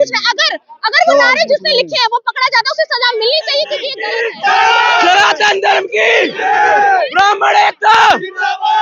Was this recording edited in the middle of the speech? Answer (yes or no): yes